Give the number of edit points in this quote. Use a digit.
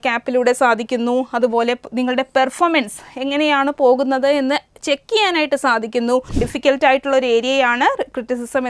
1